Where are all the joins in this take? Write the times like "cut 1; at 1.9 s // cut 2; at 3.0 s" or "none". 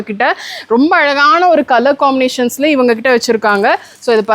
none